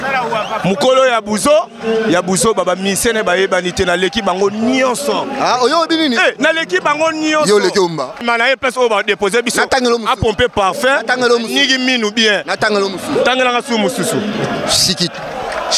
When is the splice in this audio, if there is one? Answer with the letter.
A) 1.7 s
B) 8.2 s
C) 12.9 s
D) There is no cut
B